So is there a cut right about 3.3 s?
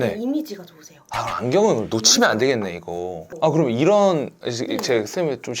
yes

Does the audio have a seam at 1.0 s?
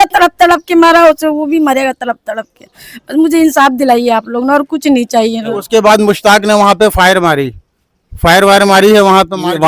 no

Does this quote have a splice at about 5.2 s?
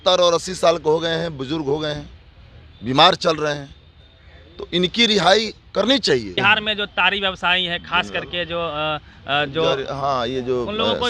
no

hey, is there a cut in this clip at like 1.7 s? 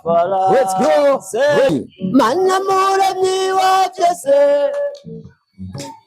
yes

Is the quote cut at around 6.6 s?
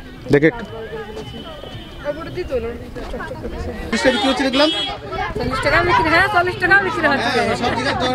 no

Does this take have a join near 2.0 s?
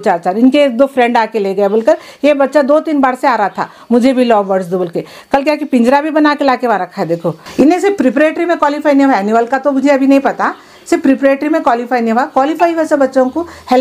no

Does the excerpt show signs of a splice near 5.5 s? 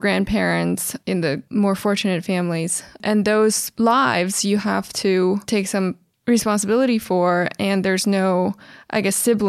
yes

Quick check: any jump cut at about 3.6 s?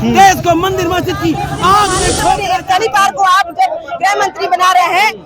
no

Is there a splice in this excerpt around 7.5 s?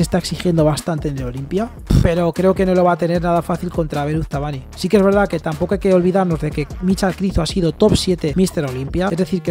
no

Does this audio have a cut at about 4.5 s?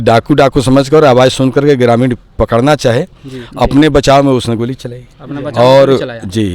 no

